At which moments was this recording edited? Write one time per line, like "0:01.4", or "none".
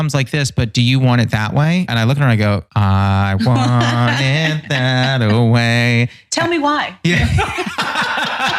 0:01.9
0:02.7